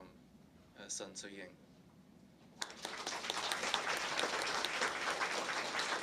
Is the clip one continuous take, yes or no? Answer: no